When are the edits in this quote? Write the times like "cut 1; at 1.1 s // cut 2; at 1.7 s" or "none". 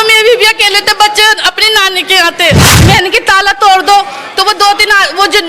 cut 1; at 2.7 s

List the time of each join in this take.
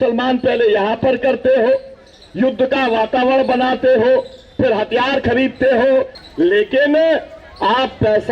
cut 1; at 6.2 s

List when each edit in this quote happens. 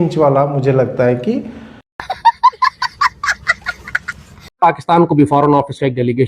none

